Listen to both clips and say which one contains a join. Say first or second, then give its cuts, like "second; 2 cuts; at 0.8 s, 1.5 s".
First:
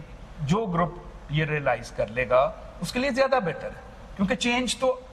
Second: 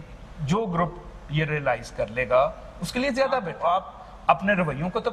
second; 1 cut; at 3.5 s